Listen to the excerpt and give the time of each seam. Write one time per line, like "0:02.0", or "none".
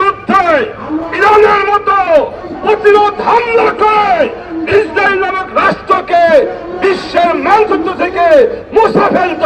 none